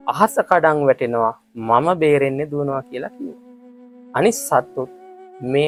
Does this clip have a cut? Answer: no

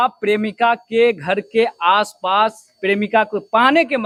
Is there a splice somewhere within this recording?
no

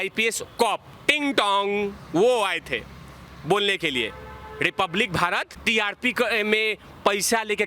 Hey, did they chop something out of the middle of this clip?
yes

